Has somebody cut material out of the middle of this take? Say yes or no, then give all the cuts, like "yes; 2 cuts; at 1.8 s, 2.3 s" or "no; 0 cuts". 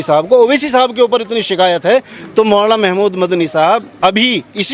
no; 0 cuts